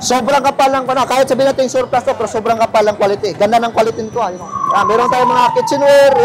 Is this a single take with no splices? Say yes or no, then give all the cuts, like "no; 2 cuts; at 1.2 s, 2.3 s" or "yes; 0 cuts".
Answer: yes; 0 cuts